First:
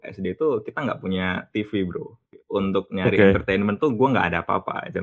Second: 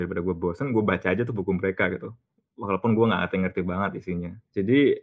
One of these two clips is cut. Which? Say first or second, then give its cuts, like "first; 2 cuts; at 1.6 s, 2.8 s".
first; 1 cut; at 2.4 s